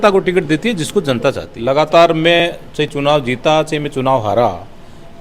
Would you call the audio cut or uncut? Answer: cut